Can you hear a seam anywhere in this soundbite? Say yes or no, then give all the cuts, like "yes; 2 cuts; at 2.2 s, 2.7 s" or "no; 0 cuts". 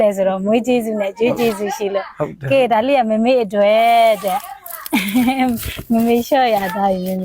no; 0 cuts